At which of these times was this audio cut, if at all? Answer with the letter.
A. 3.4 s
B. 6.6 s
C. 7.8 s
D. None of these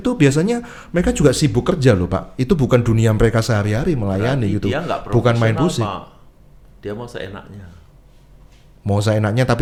D